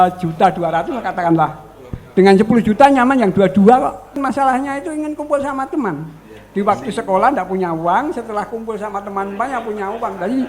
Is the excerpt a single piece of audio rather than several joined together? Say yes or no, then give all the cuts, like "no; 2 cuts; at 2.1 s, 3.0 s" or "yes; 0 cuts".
no; 1 cut; at 4.2 s